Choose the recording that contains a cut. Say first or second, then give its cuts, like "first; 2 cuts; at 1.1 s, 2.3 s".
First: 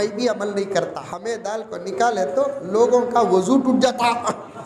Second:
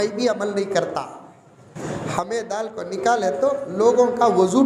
first; 1 cut; at 1.1 s